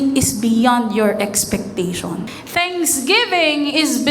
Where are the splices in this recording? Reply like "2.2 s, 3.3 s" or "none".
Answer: 2.3 s

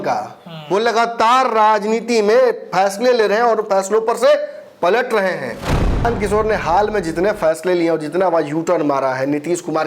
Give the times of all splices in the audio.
6.0 s

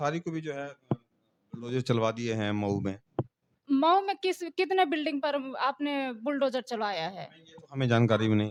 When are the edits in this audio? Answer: none

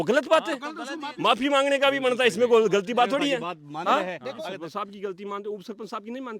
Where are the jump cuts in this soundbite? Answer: 1.0 s, 4.4 s

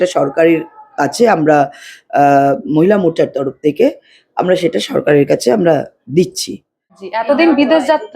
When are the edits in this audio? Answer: 7.1 s

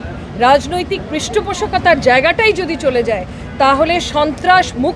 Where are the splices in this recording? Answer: none

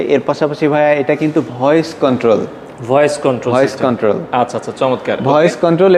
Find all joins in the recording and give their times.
none

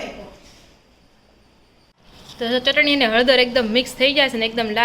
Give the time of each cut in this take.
2.2 s

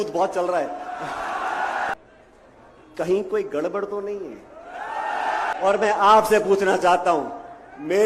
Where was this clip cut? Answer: 1.9 s, 5.5 s

